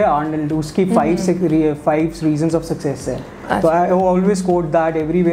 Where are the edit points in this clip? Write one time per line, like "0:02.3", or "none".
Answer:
none